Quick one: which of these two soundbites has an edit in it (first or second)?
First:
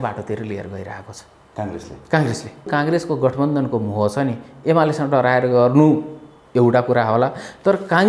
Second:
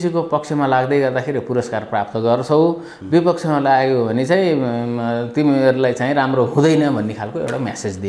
first